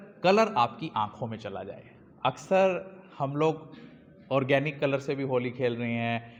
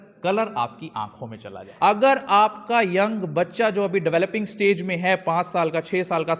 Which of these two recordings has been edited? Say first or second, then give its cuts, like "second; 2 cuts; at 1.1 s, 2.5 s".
second; 1 cut; at 2.0 s